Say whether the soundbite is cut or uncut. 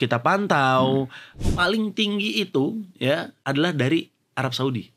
cut